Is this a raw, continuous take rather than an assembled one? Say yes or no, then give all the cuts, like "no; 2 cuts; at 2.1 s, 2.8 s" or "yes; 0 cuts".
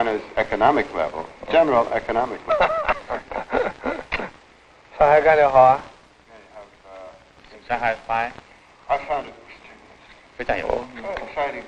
yes; 0 cuts